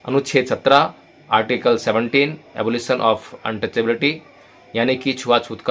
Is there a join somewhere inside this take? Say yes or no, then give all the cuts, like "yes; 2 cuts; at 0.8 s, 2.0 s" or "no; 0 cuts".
no; 0 cuts